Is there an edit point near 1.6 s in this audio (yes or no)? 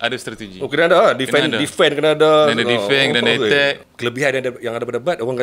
no